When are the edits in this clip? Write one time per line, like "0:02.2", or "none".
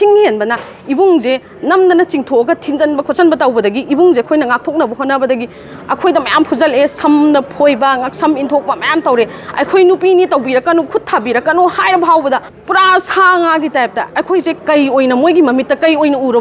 none